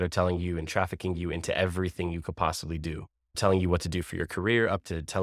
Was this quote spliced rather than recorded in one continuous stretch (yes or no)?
yes